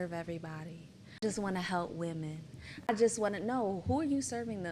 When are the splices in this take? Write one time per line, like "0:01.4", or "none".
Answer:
0:01.2
0:02.9